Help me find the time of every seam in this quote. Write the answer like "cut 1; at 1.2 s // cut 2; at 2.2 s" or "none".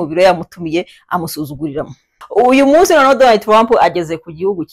cut 1; at 2.1 s